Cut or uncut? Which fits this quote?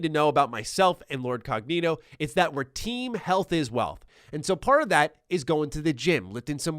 cut